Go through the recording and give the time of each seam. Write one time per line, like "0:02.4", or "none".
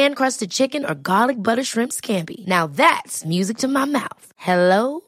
none